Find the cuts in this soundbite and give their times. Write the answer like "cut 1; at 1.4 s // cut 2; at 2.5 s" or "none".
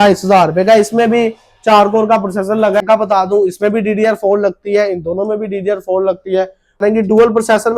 cut 1; at 2.8 s // cut 2; at 6.8 s